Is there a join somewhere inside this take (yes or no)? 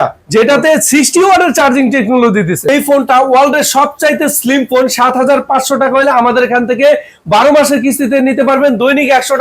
yes